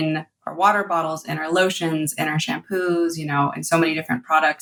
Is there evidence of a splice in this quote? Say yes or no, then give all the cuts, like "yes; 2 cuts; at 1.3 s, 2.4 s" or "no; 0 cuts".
no; 0 cuts